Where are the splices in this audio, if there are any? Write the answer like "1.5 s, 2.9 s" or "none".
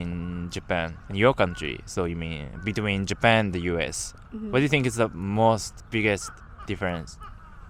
1.0 s, 6.1 s